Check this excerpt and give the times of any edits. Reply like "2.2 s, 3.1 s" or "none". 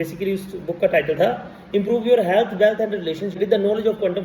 3.3 s